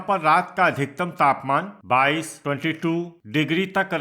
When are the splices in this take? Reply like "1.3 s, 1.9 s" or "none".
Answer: 1.8 s, 3.1 s